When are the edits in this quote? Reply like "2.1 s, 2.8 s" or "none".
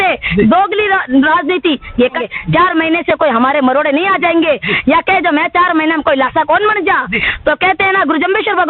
2.2 s